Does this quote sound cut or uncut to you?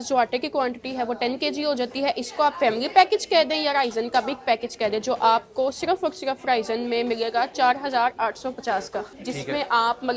cut